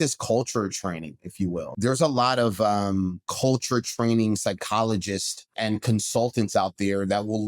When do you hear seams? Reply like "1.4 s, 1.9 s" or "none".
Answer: 1.7 s, 3.2 s, 5.5 s